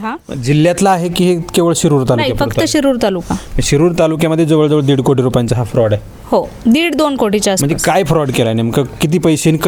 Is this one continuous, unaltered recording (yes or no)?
yes